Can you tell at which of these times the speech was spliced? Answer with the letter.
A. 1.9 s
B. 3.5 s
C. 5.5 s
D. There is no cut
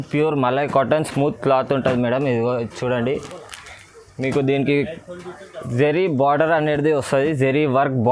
D